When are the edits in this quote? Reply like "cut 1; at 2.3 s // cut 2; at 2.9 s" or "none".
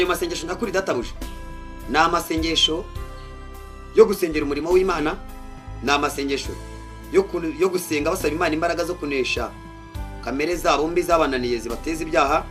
none